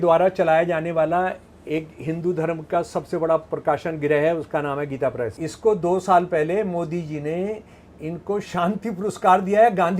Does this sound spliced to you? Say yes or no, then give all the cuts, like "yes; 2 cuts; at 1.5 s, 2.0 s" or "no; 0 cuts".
yes; 1 cut; at 5.4 s